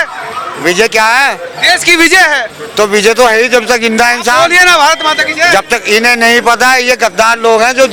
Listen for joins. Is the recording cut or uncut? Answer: uncut